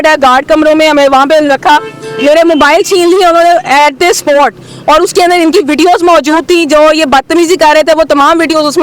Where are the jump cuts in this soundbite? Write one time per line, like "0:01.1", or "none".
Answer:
none